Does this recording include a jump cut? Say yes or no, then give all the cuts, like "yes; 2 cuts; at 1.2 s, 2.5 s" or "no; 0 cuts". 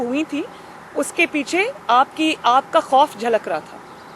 no; 0 cuts